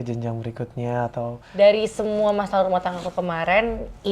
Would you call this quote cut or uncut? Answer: cut